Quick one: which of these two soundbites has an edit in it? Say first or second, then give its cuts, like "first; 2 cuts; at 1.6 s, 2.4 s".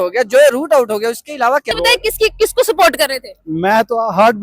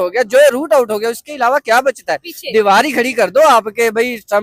first; 1 cut; at 1.7 s